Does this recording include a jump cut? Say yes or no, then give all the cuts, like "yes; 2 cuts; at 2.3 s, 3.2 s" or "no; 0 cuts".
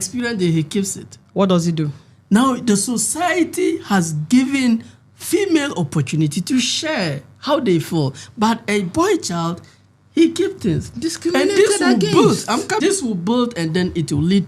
yes; 1 cut; at 12.8 s